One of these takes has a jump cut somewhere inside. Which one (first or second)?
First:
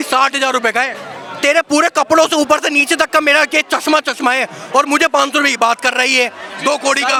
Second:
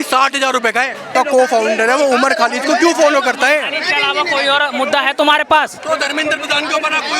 second